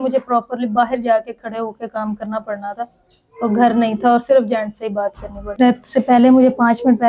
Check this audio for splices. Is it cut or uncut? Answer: cut